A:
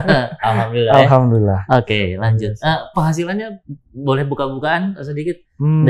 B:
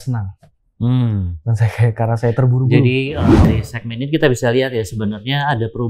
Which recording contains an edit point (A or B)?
B